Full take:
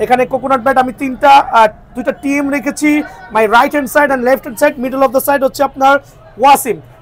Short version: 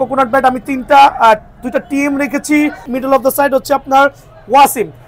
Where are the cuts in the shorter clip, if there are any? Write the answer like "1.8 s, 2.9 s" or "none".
2.9 s